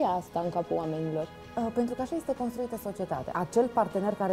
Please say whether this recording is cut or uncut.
cut